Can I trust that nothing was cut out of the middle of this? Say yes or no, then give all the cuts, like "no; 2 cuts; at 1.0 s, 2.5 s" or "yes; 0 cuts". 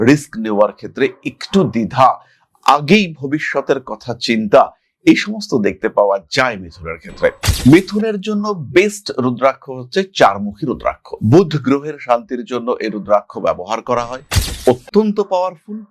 no; 1 cut; at 7.5 s